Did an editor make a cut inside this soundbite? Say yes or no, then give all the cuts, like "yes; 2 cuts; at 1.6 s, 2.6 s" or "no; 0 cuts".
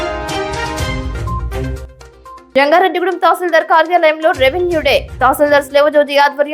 yes; 1 cut; at 1.9 s